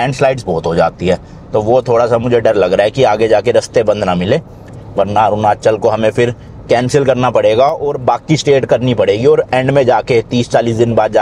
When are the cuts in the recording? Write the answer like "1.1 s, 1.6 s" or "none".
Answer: none